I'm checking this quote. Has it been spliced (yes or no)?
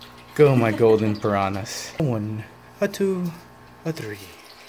yes